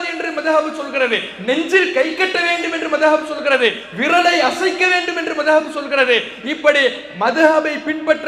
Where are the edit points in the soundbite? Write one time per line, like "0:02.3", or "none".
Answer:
none